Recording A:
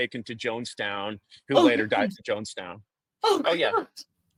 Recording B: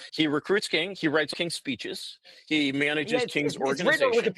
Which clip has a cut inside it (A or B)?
B